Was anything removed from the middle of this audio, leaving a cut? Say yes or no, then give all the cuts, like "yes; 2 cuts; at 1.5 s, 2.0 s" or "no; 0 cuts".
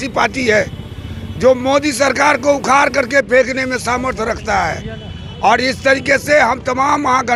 no; 0 cuts